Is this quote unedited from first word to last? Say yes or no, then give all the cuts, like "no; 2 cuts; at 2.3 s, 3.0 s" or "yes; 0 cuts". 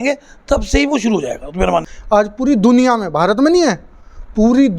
no; 1 cut; at 1.9 s